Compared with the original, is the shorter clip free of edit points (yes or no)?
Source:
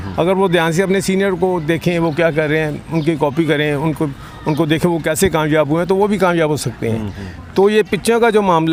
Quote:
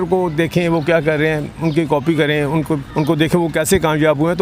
no